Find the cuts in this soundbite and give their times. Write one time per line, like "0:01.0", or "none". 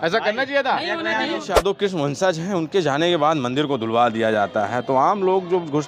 0:01.5